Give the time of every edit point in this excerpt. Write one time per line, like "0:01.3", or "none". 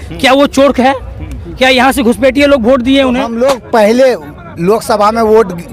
0:03.3